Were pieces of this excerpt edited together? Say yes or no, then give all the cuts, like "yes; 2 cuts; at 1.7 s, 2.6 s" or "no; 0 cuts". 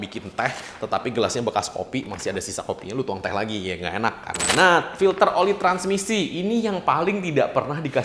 yes; 1 cut; at 4.5 s